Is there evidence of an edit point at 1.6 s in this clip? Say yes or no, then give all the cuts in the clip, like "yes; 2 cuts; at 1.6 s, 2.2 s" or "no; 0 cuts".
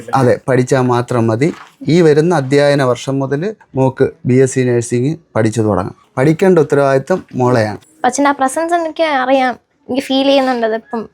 no; 3 cuts; at 3.6 s, 6.0 s, 7.8 s